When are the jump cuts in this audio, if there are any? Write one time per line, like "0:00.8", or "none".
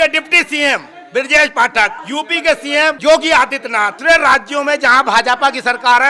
0:02.0
0:03.0
0:04.0